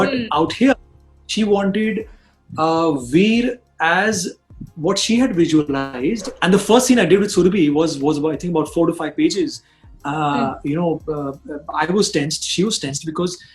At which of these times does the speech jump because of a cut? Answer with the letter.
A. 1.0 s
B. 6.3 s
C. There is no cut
B